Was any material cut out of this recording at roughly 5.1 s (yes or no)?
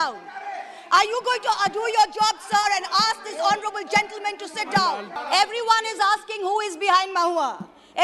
yes